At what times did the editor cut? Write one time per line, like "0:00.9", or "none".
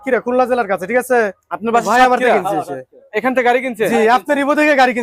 none